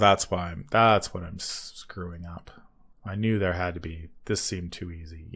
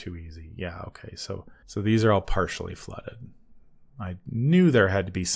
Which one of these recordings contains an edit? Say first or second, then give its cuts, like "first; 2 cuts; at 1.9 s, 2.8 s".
second; 1 cut; at 1.6 s